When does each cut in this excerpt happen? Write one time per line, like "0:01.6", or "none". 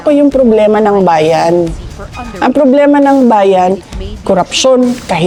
none